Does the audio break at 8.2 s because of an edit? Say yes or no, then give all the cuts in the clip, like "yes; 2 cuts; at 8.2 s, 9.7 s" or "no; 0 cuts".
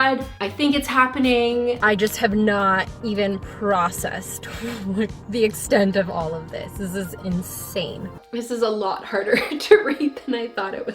yes; 2 cuts; at 1.8 s, 8.2 s